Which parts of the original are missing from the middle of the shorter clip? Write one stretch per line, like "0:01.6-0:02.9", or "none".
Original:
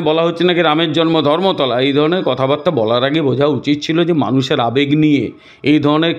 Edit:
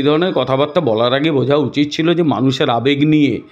none